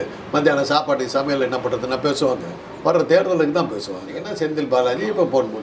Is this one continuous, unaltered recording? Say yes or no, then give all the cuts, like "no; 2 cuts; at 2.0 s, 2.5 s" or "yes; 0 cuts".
no; 1 cut; at 4.2 s